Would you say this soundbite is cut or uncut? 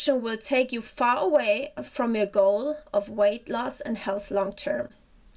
uncut